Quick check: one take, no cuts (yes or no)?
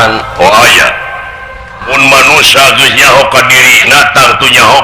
no